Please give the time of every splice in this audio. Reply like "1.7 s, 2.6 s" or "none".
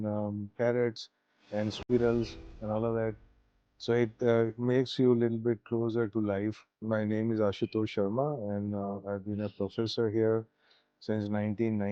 6.8 s